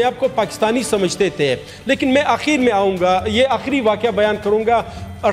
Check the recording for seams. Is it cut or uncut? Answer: uncut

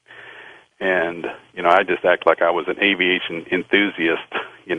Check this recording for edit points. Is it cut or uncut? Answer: uncut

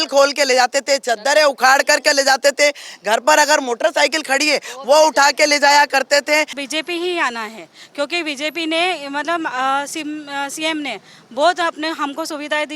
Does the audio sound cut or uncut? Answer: cut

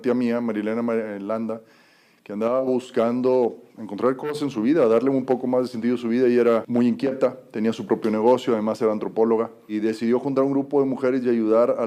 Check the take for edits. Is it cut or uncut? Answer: cut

